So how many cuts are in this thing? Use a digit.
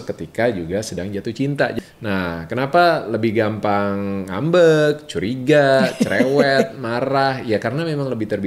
1